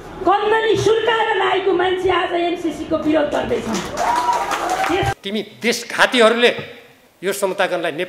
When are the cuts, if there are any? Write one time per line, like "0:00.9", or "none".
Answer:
0:05.1